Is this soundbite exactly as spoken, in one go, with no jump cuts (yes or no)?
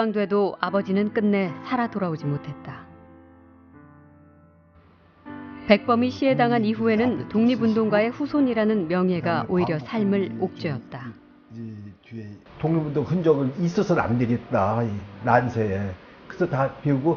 no